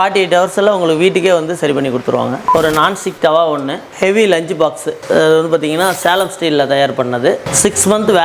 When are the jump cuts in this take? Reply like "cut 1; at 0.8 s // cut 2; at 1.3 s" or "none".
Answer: cut 1; at 2.4 s // cut 2; at 3.9 s